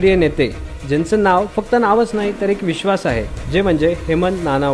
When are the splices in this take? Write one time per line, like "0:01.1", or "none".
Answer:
none